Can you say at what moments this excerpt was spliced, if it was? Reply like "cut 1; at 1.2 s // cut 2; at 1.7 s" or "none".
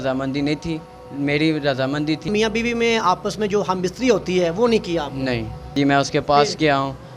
cut 1; at 2.3 s // cut 2; at 5.7 s